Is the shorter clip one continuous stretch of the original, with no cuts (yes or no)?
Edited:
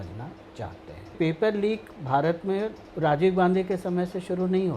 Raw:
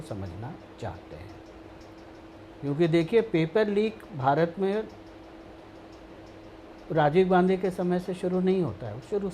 no